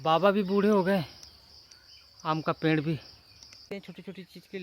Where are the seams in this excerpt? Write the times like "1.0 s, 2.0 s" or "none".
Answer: 3.7 s